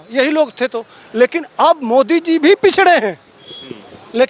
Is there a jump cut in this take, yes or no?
no